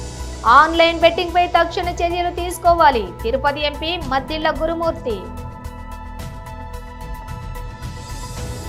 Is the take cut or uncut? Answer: uncut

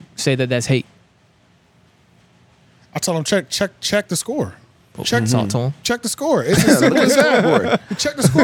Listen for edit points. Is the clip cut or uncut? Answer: uncut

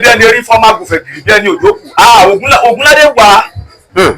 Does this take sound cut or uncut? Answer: uncut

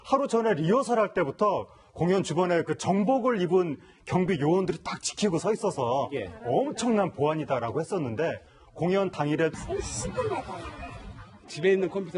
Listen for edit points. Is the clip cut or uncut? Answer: uncut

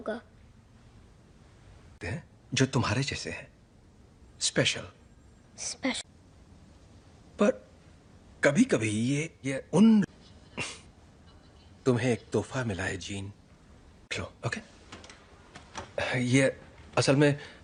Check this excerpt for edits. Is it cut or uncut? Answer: uncut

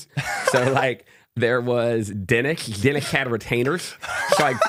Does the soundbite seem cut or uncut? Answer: uncut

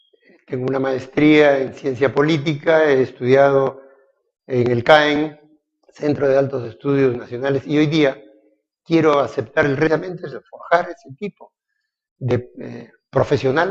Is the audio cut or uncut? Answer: uncut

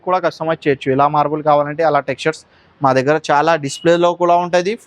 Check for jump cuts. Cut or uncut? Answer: uncut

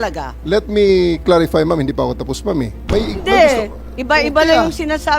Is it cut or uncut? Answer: cut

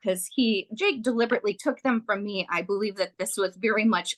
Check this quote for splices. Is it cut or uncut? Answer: uncut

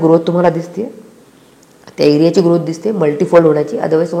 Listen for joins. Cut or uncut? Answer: uncut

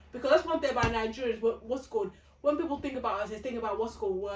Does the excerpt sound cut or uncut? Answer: uncut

